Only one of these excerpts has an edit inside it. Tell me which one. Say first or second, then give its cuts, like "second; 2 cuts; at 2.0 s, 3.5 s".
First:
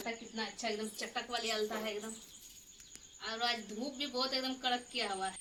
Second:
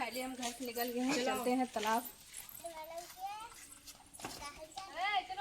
second; 1 cut; at 2.7 s